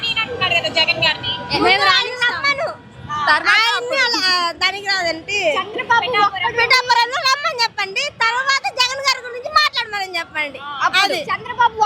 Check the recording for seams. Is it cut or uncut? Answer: uncut